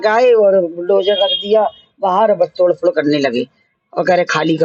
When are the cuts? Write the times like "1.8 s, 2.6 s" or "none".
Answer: none